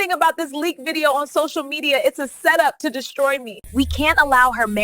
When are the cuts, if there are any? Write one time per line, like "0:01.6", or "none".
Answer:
0:03.6